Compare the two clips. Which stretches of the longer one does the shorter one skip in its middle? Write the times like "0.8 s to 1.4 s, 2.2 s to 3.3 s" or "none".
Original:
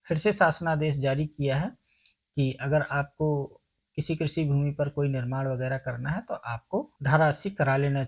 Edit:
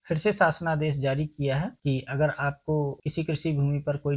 1.7 s to 2.3 s, 3.5 s to 3.9 s